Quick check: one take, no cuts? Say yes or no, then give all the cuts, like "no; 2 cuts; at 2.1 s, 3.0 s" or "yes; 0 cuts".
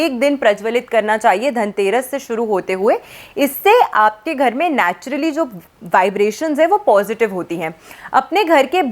yes; 0 cuts